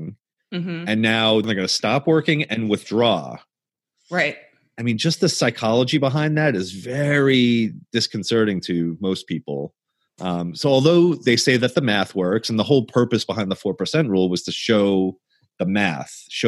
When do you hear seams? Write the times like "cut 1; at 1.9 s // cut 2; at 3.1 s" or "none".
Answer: cut 1; at 1.5 s